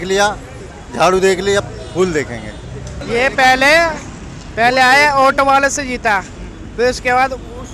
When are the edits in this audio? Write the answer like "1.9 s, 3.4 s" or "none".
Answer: none